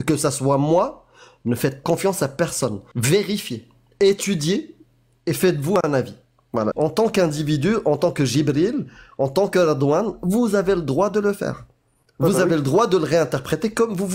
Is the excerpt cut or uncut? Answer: cut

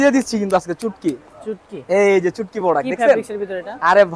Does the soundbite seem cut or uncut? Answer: uncut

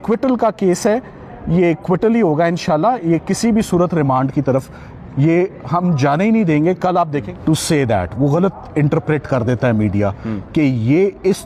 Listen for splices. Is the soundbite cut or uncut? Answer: cut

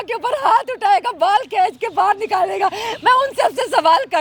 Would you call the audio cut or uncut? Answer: uncut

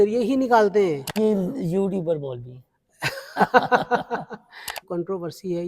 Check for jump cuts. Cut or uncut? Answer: cut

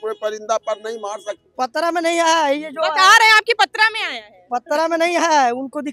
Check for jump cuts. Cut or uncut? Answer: cut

